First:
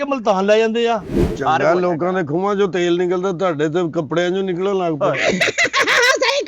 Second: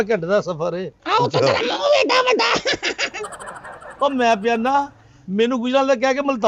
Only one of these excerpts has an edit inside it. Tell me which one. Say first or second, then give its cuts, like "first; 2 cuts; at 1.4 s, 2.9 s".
first; 1 cut; at 1.2 s